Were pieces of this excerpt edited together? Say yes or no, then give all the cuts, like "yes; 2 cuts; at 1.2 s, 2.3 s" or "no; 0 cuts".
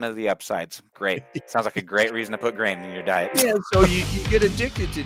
no; 0 cuts